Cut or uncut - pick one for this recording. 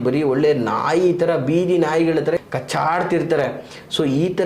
cut